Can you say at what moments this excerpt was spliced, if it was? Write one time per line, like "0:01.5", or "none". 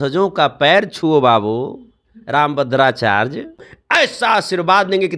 0:03.7